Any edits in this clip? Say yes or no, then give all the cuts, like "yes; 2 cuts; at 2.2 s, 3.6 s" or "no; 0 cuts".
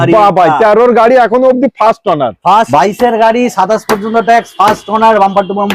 yes; 1 cut; at 2.7 s